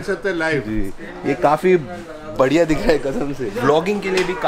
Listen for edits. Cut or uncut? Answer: cut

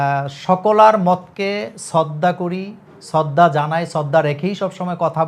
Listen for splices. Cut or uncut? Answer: uncut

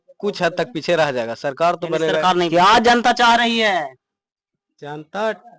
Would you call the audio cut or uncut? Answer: cut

